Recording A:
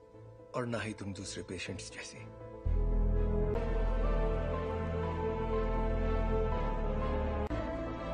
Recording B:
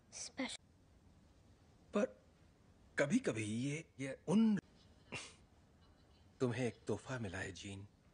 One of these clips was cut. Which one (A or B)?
A